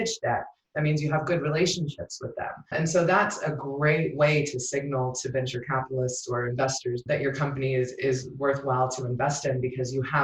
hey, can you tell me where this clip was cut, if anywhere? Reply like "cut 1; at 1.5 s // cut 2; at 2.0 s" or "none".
cut 1; at 2.7 s // cut 2; at 7.0 s